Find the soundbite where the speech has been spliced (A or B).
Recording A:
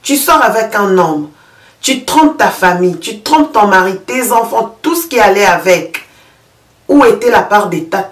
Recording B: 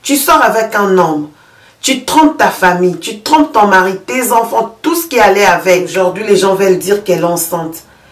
B